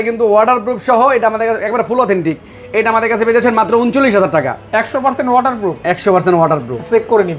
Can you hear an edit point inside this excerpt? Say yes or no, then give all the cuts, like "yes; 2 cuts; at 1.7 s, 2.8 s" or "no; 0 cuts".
no; 0 cuts